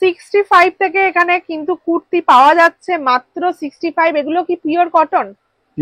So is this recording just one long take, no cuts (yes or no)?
yes